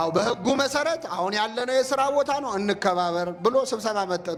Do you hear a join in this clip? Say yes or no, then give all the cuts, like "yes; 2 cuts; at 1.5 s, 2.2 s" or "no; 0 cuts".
no; 0 cuts